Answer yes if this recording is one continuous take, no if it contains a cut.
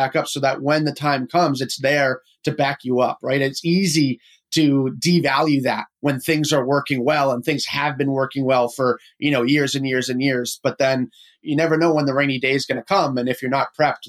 yes